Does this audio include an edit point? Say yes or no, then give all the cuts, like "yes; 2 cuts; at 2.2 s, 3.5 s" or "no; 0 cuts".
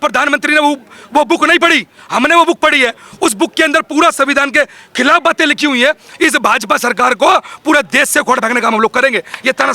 yes; 1 cut; at 6.1 s